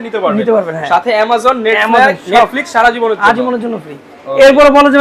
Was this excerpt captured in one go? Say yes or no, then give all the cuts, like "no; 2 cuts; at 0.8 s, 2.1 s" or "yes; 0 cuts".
yes; 0 cuts